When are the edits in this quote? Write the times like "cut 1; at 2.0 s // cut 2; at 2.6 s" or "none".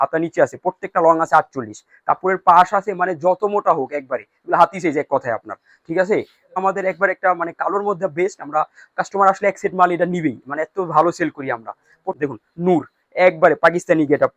cut 1; at 6.6 s // cut 2; at 12.2 s